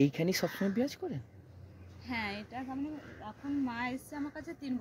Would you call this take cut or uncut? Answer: uncut